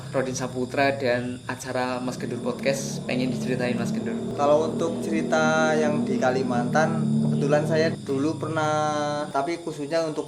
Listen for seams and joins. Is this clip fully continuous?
no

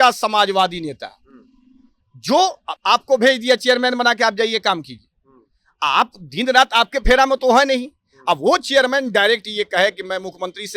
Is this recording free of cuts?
yes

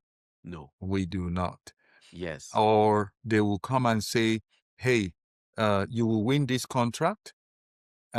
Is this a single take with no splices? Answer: yes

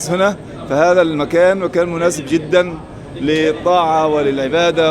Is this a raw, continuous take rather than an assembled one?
yes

